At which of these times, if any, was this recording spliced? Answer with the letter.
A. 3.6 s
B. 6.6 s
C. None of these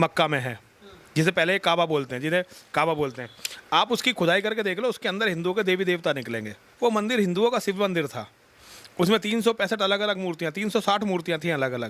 B